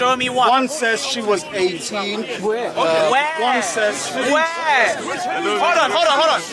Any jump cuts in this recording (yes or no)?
no